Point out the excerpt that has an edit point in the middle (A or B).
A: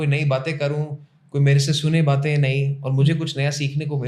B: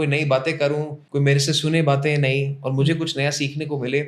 B